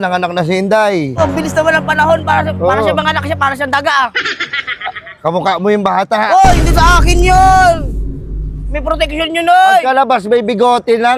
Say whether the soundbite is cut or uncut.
uncut